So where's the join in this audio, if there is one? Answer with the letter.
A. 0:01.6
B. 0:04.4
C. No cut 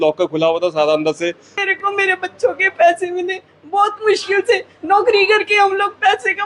A